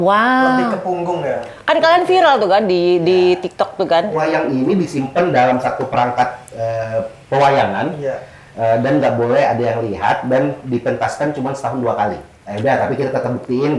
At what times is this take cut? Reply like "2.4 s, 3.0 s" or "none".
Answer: 4.2 s, 12.3 s